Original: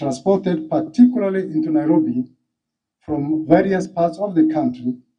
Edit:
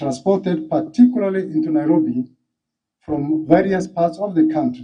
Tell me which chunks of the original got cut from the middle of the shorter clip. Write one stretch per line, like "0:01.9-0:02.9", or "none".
none